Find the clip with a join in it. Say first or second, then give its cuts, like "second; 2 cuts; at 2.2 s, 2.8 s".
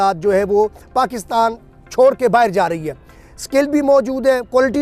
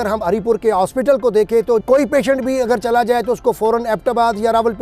second; 1 cut; at 1.8 s